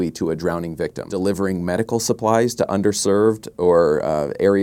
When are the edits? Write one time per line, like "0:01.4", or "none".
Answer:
0:01.1